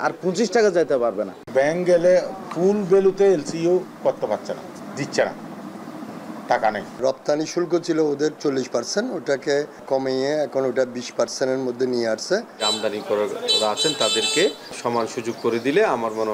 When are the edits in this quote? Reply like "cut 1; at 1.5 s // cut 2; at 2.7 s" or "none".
cut 1; at 1.3 s // cut 2; at 4.8 s // cut 3; at 7.0 s // cut 4; at 9.8 s // cut 5; at 12.7 s // cut 6; at 14.8 s